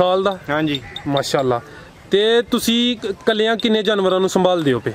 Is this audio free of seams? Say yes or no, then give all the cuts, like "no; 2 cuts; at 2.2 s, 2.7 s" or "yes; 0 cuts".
yes; 0 cuts